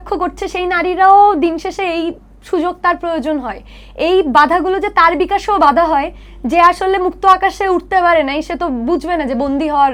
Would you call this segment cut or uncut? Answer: uncut